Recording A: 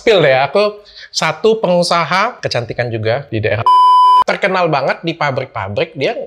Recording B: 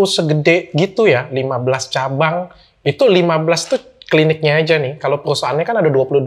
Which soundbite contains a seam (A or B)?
A